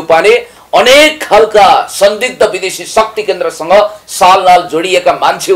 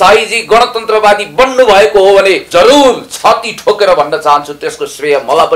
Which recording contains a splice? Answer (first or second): second